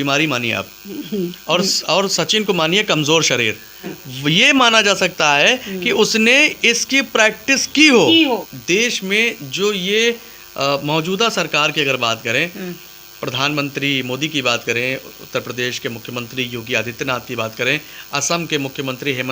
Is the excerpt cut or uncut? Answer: cut